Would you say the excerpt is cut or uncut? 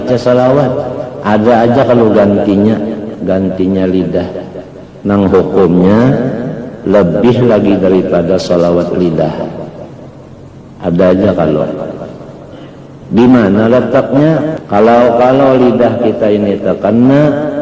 cut